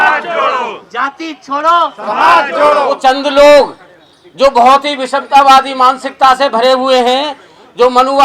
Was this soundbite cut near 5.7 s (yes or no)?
no